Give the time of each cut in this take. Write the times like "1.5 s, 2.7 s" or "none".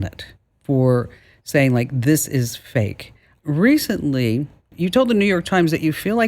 3.3 s, 4.7 s